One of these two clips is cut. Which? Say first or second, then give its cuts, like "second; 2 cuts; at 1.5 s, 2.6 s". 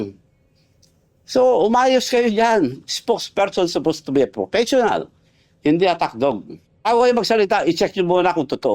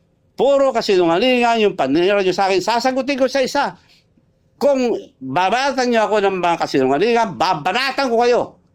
first; 1 cut; at 6.9 s